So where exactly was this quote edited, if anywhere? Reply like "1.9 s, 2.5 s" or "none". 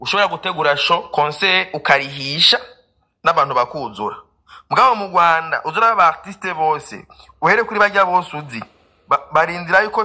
none